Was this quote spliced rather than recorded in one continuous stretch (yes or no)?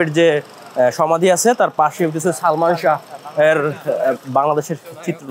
no